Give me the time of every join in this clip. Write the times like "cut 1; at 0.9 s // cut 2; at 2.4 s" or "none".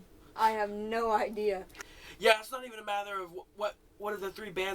cut 1; at 1.8 s